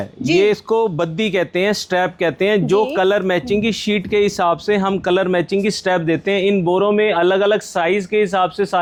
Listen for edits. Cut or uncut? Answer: uncut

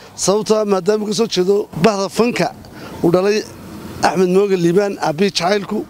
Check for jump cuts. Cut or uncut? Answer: cut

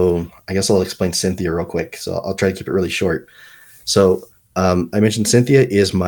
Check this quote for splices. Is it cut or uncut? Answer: uncut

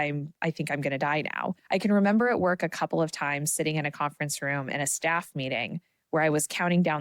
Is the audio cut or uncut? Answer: cut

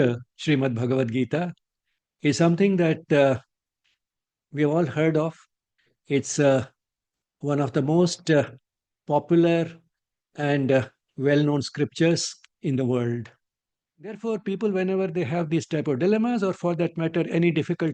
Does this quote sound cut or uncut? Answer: cut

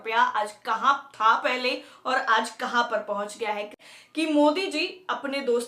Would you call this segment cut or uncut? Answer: cut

